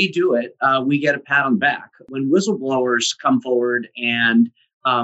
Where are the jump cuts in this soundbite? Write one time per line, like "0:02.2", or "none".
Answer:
0:02.0